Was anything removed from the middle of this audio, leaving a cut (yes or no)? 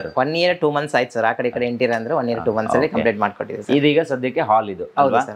no